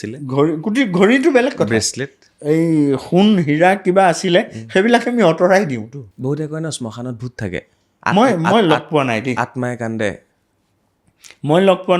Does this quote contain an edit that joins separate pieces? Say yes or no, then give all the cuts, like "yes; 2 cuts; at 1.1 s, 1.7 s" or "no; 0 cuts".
yes; 1 cut; at 6.0 s